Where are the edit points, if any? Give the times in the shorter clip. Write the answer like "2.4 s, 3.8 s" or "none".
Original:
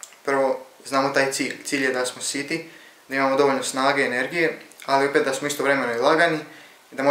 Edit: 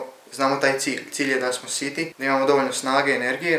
2.1 s